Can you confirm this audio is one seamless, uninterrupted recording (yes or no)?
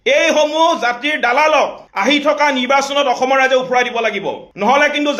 yes